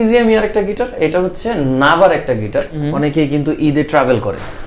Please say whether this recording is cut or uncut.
cut